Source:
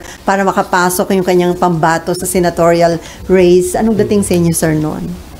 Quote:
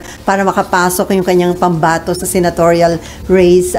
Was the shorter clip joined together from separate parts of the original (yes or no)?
no